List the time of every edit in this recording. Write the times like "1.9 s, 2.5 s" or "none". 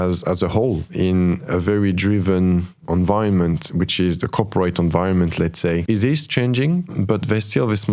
0.9 s, 2.8 s, 5.8 s, 6.9 s